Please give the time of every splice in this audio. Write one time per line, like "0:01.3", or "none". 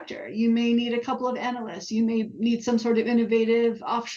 none